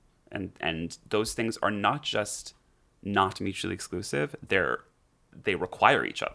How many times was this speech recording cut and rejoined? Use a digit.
1